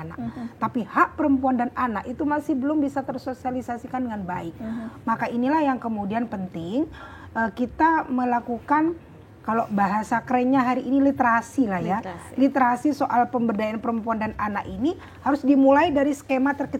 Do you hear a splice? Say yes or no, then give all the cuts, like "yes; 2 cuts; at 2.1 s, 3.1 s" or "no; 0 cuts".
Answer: no; 0 cuts